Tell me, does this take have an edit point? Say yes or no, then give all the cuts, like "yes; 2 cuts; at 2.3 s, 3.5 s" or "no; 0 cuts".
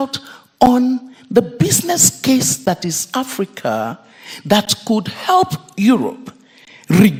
no; 0 cuts